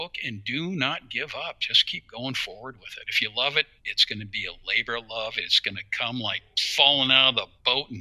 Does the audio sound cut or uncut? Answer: uncut